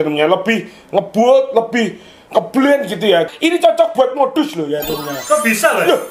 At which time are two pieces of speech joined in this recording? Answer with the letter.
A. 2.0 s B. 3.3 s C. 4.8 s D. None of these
B